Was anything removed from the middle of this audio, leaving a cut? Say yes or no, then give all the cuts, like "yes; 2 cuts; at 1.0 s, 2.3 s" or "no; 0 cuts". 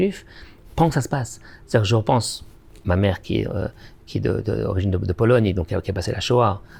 no; 0 cuts